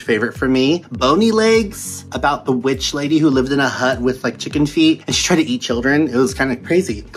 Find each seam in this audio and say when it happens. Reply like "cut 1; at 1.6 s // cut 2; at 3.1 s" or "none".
none